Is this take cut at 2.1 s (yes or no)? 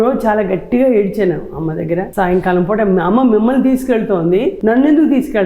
yes